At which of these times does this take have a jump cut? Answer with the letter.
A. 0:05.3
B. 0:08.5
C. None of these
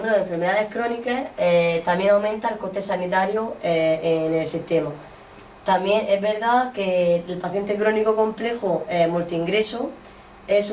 C